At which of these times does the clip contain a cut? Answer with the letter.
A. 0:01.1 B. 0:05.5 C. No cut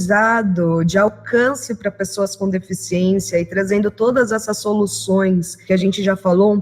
B